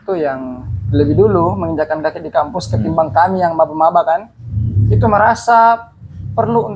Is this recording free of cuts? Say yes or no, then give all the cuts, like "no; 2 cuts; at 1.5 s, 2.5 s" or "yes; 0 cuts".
yes; 0 cuts